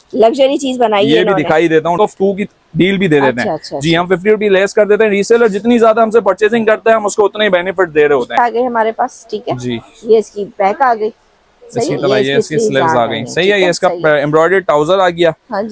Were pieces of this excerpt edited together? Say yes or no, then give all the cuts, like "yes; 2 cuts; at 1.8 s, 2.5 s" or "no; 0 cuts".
yes; 2 cuts; at 2.0 s, 8.3 s